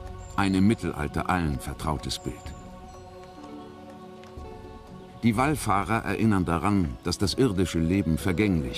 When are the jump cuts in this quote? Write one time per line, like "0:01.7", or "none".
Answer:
none